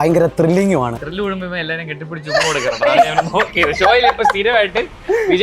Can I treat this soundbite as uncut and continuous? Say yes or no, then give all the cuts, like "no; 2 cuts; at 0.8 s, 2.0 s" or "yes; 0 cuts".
no; 1 cut; at 0.9 s